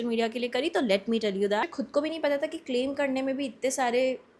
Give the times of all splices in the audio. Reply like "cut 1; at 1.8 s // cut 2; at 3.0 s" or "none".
cut 1; at 1.7 s